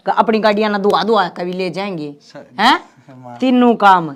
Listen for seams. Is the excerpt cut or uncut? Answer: uncut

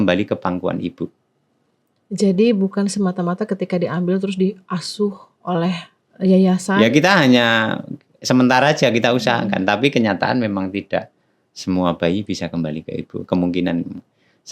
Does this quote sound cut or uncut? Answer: uncut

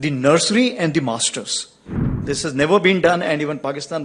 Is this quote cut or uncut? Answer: cut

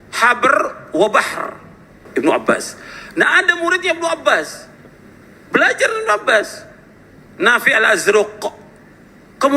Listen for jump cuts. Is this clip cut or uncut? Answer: cut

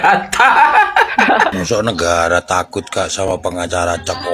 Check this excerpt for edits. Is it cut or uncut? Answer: cut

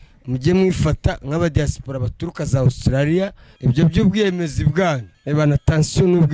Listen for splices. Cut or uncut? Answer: cut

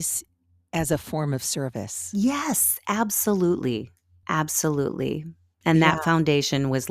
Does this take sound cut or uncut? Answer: uncut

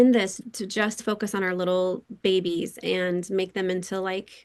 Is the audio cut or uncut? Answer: cut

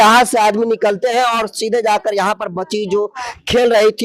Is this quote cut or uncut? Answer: uncut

